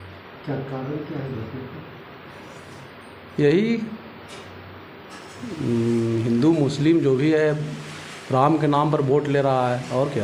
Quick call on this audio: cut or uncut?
uncut